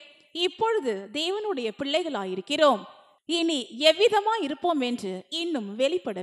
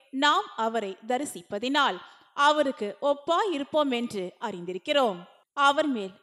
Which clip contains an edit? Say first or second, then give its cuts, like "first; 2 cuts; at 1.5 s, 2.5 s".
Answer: second; 2 cuts; at 2.2 s, 5.3 s